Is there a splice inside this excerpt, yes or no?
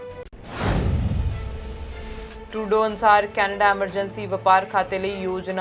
yes